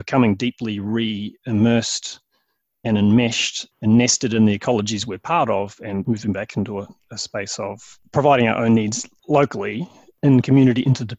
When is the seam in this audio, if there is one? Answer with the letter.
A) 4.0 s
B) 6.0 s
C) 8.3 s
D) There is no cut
B